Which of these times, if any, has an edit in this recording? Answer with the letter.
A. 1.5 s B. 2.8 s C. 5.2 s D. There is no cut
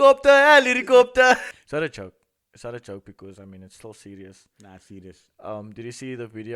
A